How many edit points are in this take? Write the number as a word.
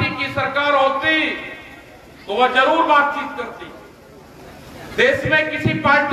zero